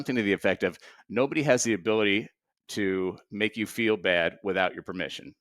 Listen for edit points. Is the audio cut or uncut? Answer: uncut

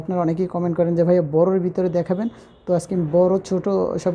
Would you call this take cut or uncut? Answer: uncut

